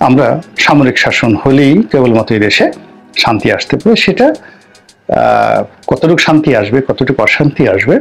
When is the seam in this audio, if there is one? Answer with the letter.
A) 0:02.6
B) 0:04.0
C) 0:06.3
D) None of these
D